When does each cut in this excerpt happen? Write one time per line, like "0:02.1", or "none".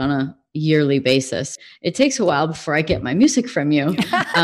0:01.5